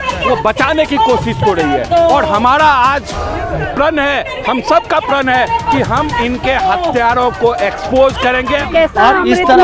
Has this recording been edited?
yes; 1 cut; at 8.6 s

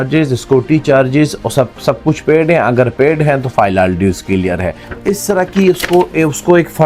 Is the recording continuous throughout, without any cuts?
no; 1 cut; at 4.9 s

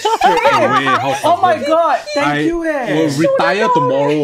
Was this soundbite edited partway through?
no; 0 cuts

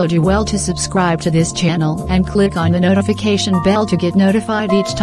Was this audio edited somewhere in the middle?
yes; 1 cut; at 1.8 s

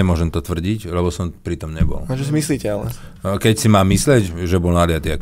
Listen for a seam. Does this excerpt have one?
no; 0 cuts

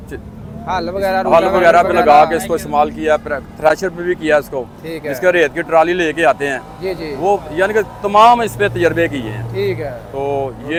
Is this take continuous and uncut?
yes; 0 cuts

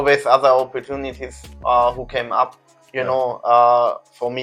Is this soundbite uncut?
yes; 0 cuts

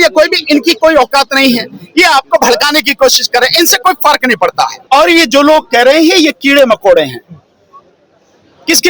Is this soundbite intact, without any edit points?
no; 1 cut; at 4.8 s

